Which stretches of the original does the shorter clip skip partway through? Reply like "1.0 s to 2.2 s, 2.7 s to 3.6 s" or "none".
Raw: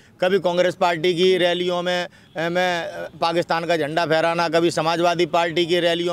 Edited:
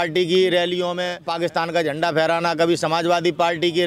2.1 s to 3.2 s